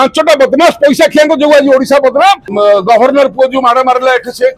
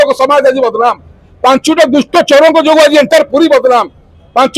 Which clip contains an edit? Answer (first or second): first